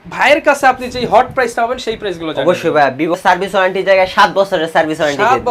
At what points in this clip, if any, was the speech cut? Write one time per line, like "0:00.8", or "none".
0:03.1